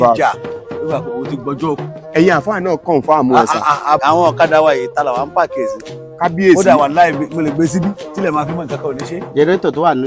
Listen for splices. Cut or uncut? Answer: cut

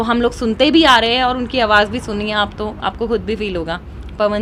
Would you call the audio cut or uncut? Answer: uncut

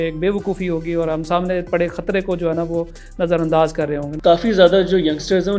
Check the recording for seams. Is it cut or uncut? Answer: cut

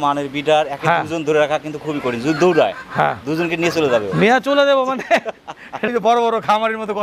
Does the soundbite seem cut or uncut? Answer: cut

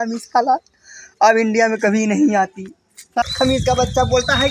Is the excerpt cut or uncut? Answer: cut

